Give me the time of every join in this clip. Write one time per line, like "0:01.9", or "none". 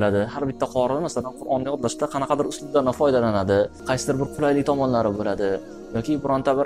0:03.8